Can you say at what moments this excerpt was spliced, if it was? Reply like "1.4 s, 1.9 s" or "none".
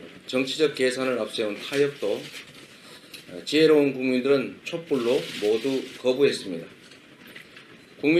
4.0 s